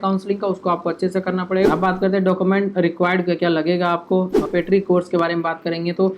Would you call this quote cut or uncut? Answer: cut